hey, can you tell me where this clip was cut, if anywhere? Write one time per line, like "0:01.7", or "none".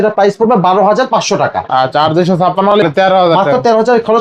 0:02.7